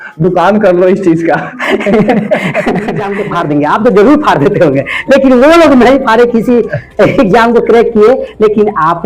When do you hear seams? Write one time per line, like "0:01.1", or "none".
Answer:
0:03.1